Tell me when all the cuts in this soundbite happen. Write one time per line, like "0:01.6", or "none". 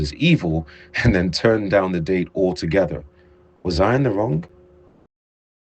none